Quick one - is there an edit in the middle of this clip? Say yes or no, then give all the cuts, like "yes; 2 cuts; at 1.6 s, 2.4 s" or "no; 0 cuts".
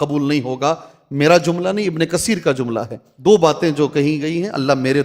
yes; 1 cut; at 3.0 s